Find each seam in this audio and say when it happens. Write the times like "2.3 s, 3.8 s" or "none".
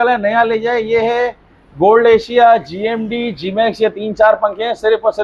none